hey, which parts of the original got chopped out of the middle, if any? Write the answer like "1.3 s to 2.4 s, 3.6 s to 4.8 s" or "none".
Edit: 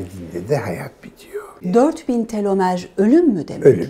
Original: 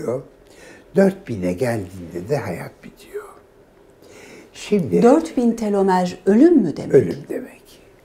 3.5 s to 5.0 s